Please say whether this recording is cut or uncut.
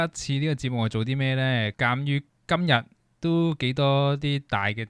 cut